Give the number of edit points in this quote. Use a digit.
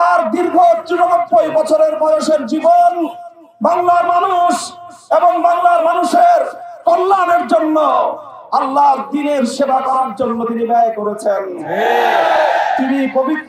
0